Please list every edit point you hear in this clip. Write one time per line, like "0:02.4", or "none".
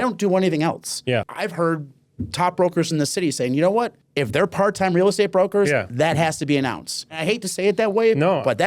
0:01.3
0:04.0
0:07.1